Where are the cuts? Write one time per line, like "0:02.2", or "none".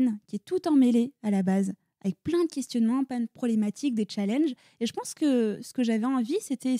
none